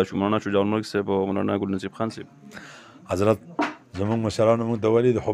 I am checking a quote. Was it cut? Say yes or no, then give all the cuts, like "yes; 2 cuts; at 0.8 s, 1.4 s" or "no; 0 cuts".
no; 0 cuts